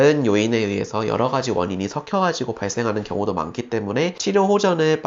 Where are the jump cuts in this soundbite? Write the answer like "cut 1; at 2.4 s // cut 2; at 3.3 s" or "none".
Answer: cut 1; at 4.2 s